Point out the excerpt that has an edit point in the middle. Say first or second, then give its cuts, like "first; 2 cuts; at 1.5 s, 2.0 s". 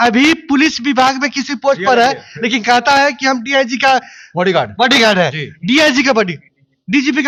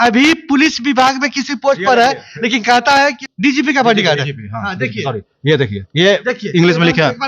second; 1 cut; at 3.2 s